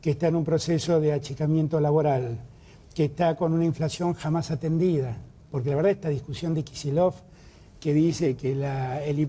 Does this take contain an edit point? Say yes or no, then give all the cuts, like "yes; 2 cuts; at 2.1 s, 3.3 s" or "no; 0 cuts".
no; 0 cuts